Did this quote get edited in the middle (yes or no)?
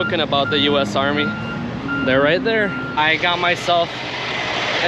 yes